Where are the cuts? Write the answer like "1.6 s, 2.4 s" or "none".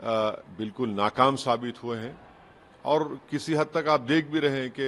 none